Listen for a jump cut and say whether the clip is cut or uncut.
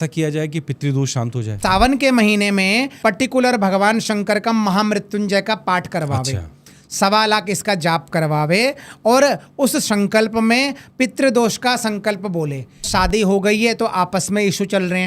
cut